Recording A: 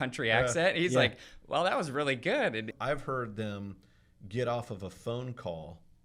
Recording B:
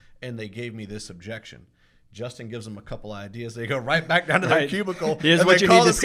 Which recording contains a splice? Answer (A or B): A